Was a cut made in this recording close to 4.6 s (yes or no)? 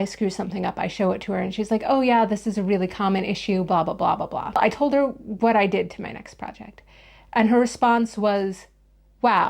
yes